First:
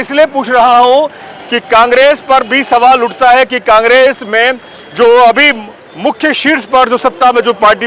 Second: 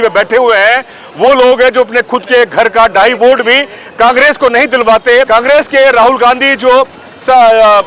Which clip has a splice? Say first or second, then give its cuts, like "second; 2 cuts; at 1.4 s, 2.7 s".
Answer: second; 1 cut; at 5.3 s